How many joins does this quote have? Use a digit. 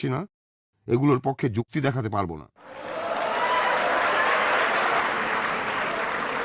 2